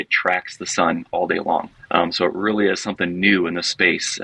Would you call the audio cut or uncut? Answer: cut